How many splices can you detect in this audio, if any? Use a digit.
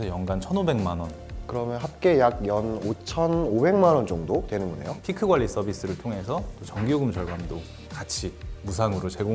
1